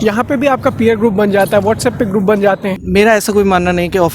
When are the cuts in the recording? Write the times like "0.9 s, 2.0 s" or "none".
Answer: 2.8 s